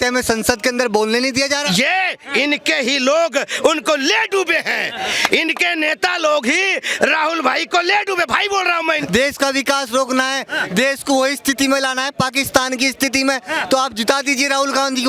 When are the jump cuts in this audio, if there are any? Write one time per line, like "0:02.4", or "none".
0:02.0
0:09.0